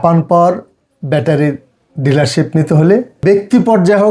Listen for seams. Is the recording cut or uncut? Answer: cut